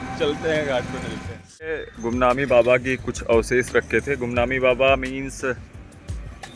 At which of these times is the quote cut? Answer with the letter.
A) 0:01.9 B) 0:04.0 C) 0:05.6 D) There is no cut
A